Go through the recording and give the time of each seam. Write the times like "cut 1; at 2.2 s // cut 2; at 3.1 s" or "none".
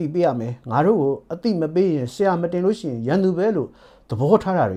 none